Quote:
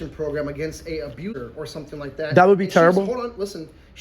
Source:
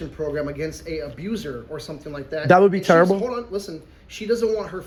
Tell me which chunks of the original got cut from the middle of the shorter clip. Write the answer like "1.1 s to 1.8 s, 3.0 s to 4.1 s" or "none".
1.3 s to 1.4 s

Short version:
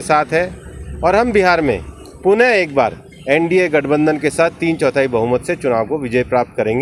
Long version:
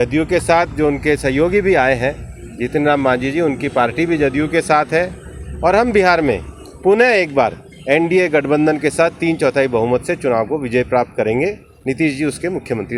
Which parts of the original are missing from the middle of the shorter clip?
none

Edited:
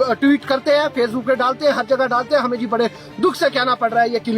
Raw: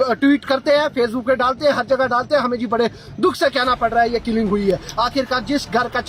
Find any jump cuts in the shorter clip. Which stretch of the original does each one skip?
none

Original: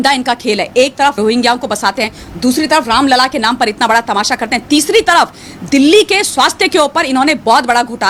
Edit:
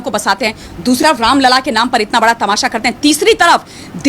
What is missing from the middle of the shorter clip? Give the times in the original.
2.6 s to 2.7 s

